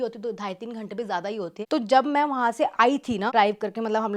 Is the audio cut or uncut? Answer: uncut